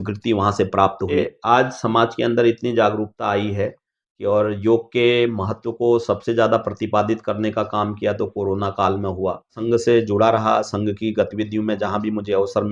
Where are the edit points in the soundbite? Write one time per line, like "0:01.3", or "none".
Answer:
0:01.1
0:09.6